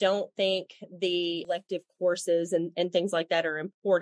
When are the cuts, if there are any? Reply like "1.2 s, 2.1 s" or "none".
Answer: 1.4 s